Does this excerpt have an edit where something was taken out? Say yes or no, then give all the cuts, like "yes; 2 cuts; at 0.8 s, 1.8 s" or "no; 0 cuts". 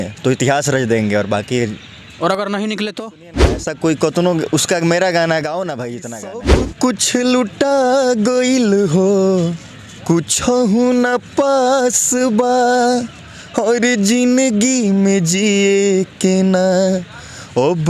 yes; 2 cuts; at 3.7 s, 6.7 s